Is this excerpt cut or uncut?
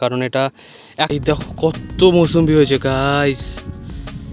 cut